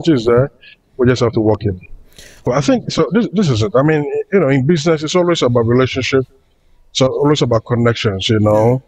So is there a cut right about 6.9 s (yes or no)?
no